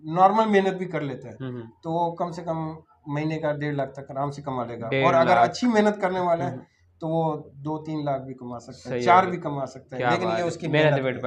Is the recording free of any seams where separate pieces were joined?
yes; 0 cuts

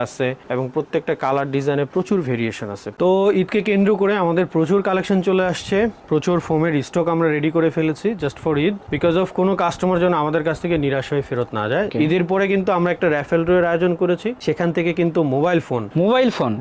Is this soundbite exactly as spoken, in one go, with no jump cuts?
no; 2 cuts; at 2.9 s, 11.9 s

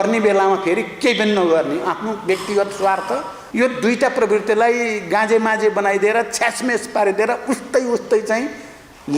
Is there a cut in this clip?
yes; 1 cut; at 3.4 s

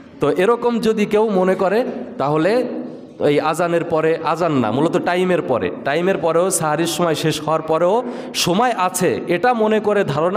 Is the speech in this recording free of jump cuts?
yes; 0 cuts

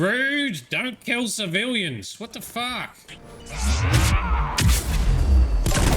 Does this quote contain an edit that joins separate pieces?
yes; 1 cut; at 3.1 s

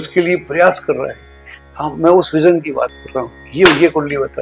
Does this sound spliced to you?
no; 0 cuts

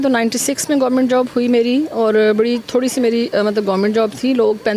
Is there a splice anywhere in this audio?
no; 0 cuts

